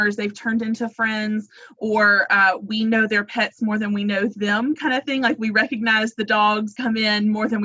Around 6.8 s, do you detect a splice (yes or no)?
yes